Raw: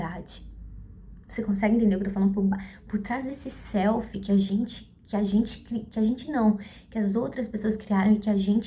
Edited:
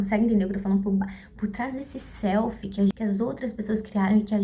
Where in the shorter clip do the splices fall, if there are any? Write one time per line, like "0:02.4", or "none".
0:02.9

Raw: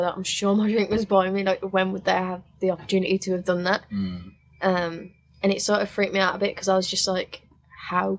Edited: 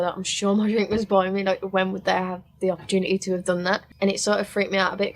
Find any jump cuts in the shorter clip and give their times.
0:03.9

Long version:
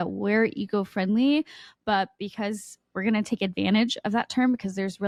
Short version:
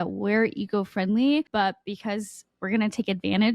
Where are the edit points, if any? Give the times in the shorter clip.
0:01.5

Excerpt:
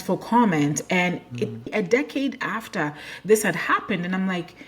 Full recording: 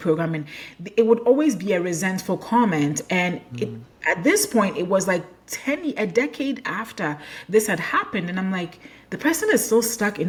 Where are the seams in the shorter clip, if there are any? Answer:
0:01.6

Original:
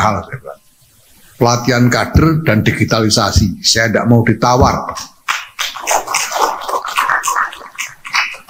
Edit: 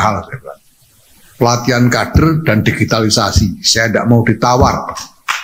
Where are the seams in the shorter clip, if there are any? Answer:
none

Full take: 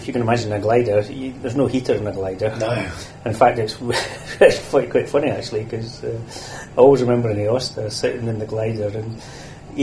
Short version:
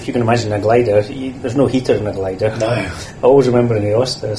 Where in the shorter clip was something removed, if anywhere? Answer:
0:03.0

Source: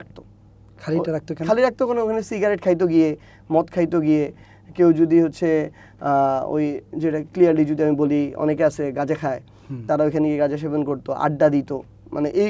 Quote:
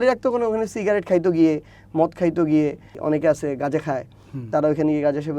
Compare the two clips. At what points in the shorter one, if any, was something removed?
0:03.0

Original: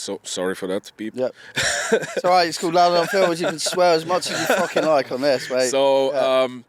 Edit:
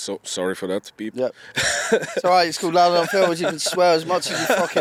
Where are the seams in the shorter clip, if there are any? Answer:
none

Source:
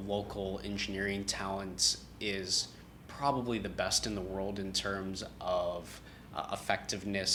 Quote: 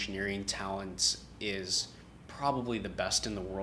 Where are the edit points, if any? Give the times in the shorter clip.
none

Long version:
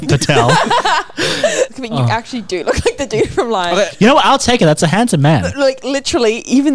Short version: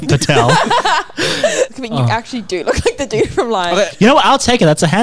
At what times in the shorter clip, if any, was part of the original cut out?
none

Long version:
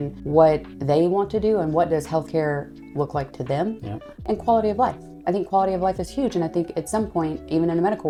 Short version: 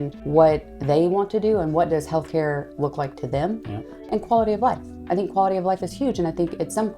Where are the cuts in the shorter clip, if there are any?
0:02.7

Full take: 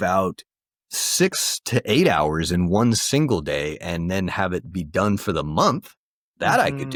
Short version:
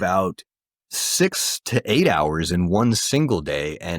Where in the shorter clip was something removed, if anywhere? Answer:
none

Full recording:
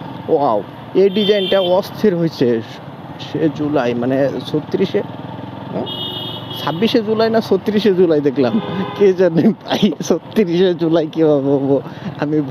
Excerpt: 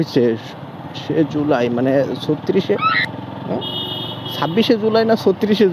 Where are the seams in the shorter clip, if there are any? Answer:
none

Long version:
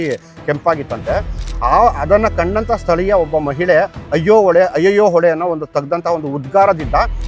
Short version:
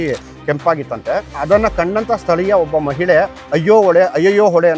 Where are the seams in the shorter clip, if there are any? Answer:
0:01.4

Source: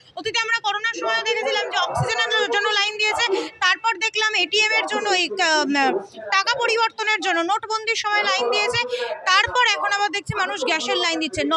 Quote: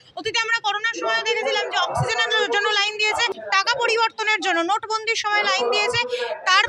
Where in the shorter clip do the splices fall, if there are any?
0:03.3

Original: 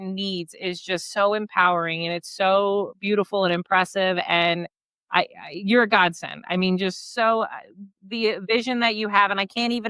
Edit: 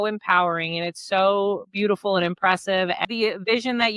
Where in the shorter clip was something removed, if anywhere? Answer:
0:03.0

